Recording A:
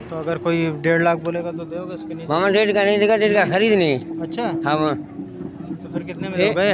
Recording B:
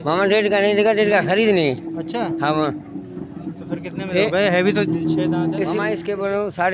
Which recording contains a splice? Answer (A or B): B